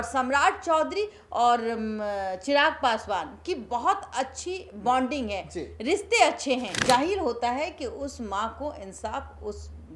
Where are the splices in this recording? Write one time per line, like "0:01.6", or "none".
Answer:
0:06.7